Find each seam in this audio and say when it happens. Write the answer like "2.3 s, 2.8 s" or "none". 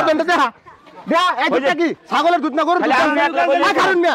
none